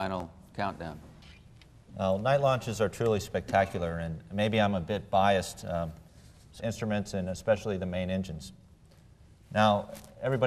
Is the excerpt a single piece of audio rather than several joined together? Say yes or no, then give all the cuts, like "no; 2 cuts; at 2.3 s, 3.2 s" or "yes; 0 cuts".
yes; 0 cuts